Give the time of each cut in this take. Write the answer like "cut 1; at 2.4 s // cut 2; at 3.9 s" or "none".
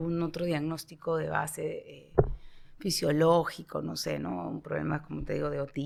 none